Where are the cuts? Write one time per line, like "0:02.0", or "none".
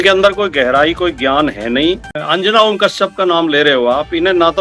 0:02.0